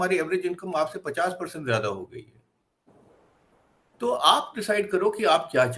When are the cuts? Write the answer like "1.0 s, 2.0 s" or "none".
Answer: none